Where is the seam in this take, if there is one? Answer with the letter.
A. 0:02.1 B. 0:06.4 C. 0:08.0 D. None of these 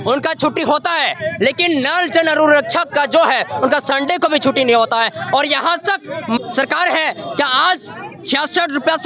B